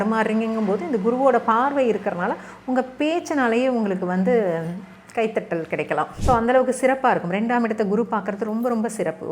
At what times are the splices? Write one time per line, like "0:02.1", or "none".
0:06.1